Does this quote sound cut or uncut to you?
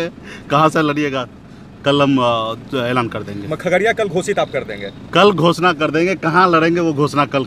uncut